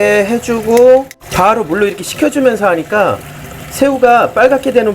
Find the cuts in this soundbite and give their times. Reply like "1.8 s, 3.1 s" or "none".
1.3 s